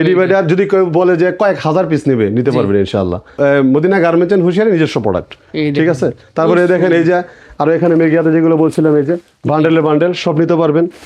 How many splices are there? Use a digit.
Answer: 0